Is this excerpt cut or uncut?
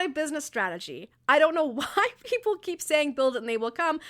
uncut